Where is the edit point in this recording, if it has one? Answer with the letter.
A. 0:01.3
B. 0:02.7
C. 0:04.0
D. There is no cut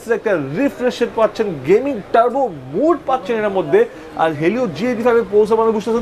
D